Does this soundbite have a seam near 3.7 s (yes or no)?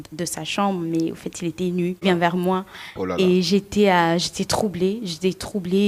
no